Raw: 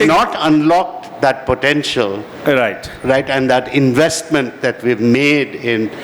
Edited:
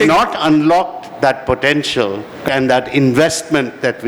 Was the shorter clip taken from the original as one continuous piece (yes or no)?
no